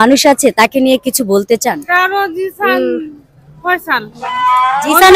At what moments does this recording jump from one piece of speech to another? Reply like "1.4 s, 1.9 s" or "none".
none